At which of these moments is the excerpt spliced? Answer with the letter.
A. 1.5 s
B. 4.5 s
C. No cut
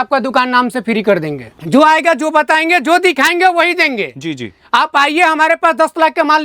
A